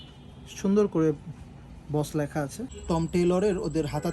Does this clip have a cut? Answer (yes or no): yes